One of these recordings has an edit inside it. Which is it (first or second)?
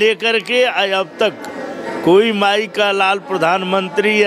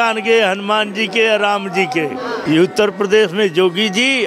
second